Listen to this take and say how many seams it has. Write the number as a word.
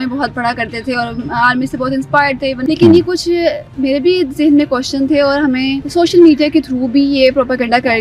two